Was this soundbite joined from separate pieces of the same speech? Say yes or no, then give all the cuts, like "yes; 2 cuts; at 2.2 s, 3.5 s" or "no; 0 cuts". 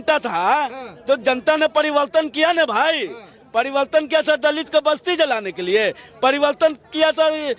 no; 0 cuts